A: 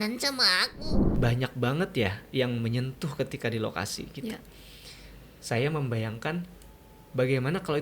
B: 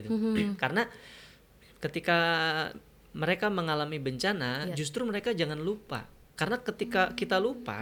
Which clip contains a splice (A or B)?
A